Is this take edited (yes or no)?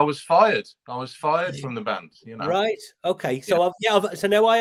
no